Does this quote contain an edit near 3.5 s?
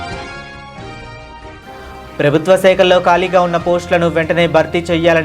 no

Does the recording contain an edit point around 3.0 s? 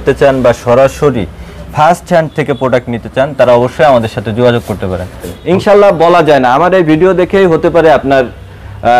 no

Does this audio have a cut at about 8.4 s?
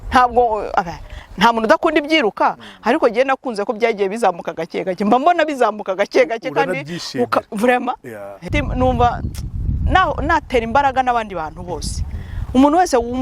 yes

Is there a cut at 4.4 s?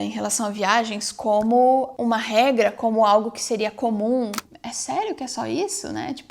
yes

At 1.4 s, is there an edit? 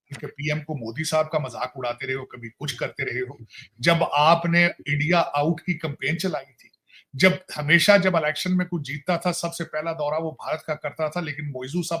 no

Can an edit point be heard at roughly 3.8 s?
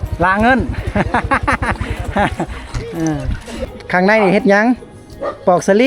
yes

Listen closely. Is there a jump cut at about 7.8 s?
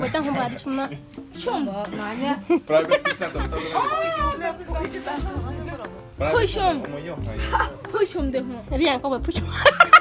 no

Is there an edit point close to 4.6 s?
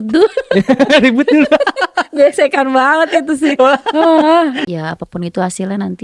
yes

